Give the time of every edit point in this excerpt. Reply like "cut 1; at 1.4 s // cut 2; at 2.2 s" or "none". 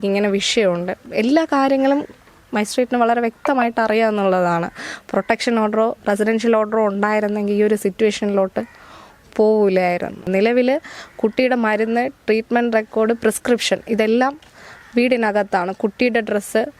cut 1; at 10.3 s